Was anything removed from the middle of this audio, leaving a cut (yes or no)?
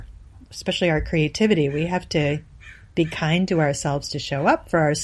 no